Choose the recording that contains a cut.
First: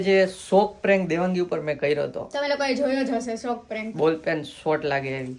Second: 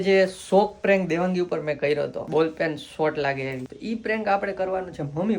second; 2 cuts; at 2.2 s, 3.7 s

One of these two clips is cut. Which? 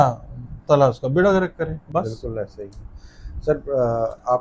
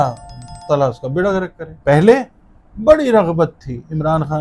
second; 1 cut; at 1.6 s

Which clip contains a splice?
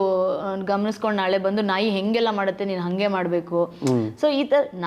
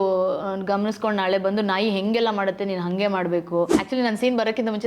second; 1 cut; at 3.8 s

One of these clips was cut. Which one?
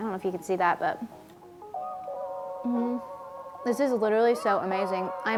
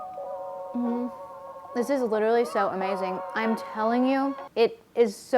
second; 1 cut; at 4.4 s

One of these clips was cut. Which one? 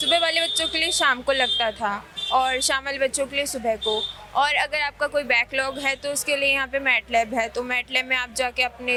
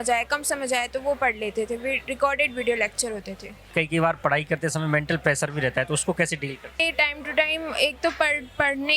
second; 2 cuts; at 3.7 s, 6.8 s

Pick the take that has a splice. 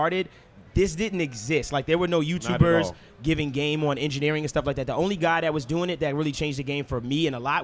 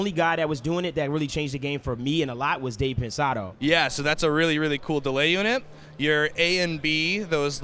second; 1 cut; at 3.6 s

